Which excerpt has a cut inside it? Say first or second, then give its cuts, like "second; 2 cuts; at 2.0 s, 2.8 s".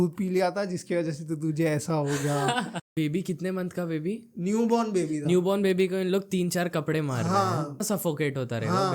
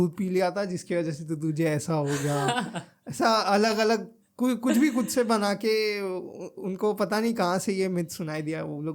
first; 2 cuts; at 2.8 s, 7.8 s